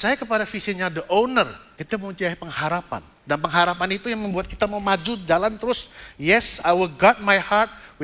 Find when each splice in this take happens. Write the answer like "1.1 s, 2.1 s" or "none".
1.7 s, 3.1 s